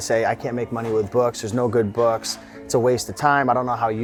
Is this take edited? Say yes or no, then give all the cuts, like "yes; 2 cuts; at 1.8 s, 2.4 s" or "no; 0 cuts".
no; 0 cuts